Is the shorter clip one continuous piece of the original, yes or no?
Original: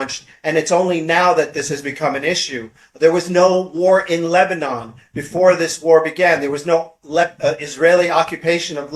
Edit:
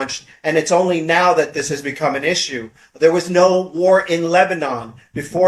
yes